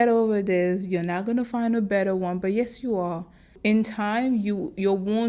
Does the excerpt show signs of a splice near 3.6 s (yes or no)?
yes